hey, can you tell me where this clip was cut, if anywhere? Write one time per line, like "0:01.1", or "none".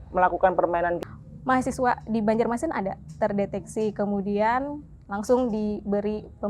0:01.0